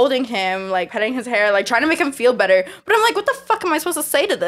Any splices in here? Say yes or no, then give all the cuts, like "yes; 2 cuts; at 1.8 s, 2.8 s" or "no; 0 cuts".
yes; 1 cut; at 0.9 s